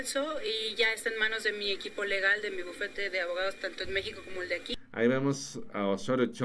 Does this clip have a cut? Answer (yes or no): yes